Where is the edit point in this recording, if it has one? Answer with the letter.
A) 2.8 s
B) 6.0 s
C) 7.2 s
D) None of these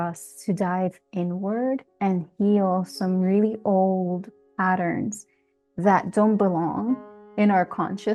D